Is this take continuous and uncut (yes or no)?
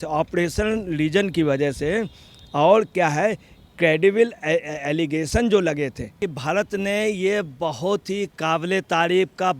no